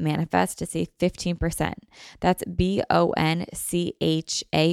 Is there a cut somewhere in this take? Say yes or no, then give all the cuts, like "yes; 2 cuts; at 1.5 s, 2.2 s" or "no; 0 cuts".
no; 0 cuts